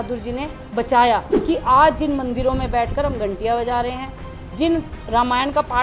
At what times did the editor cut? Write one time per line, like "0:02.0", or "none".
0:01.3